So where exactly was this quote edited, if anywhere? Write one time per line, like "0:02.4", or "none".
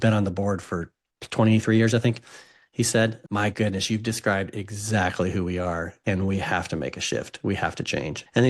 0:03.2